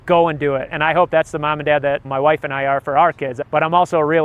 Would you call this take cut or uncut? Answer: cut